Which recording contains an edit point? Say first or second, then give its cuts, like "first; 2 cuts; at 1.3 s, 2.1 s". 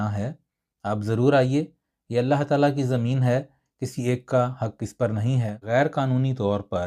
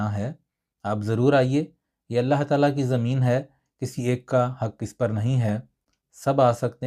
first; 1 cut; at 5.7 s